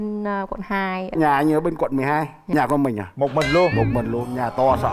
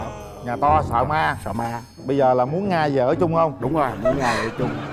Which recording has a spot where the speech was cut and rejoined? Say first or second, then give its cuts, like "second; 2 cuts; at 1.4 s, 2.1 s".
first; 1 cut; at 2.4 s